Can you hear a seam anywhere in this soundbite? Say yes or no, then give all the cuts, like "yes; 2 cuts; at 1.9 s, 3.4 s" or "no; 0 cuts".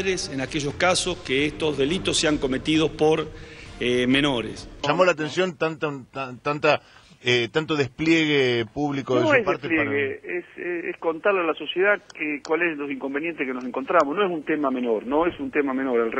yes; 1 cut; at 4.7 s